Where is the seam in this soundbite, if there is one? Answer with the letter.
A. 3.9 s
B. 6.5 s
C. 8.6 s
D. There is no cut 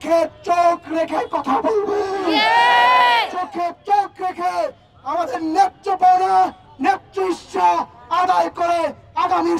D